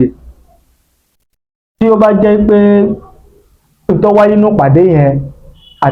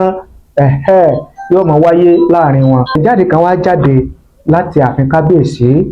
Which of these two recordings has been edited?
second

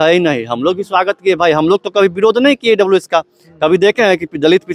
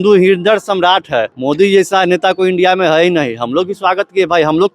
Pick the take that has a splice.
second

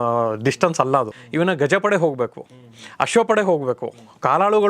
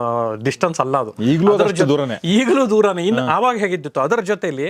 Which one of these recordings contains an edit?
first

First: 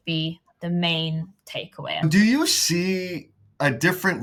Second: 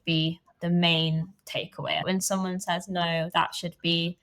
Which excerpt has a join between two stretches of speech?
second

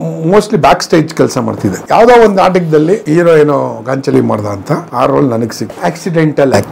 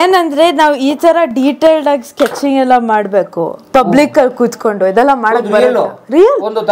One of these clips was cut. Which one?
first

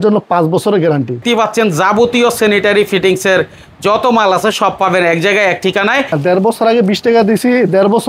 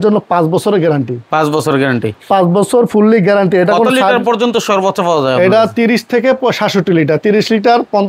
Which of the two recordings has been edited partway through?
first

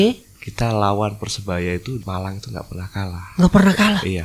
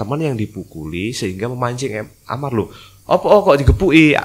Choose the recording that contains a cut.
first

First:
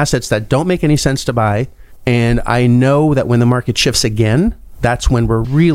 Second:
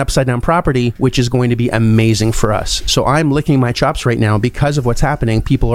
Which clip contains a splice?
second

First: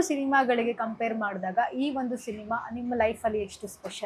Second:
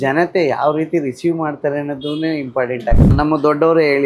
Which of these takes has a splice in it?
second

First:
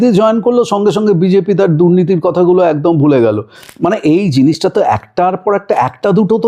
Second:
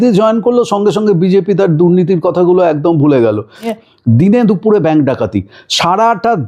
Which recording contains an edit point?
second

